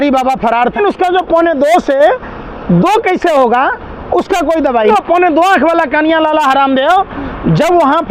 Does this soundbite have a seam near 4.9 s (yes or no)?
yes